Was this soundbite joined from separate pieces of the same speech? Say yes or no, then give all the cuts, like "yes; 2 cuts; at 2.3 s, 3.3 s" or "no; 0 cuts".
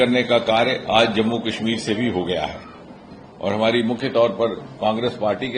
no; 0 cuts